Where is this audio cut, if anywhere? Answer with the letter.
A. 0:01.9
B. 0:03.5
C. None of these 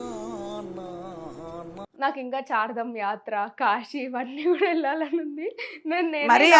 A